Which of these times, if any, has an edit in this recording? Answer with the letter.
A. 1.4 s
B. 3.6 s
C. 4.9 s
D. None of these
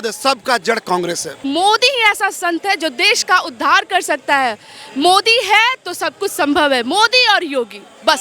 A